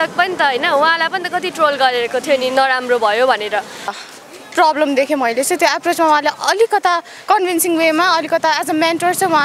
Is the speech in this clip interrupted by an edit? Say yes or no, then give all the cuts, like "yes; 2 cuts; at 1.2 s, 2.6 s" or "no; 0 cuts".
yes; 1 cut; at 4.0 s